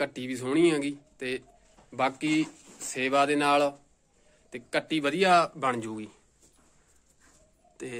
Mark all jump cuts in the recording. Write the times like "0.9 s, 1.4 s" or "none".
none